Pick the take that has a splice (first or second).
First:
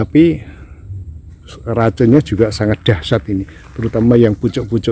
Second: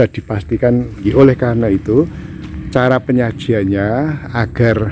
second